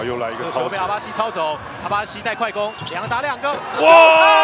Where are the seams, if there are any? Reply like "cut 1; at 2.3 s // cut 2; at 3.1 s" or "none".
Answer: none